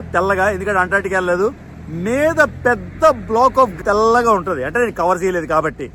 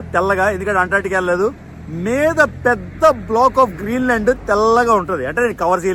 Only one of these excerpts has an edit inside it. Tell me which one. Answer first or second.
first